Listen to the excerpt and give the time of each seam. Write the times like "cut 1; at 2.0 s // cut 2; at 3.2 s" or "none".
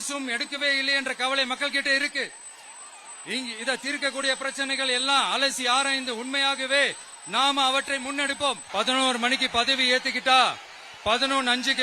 cut 1; at 8.6 s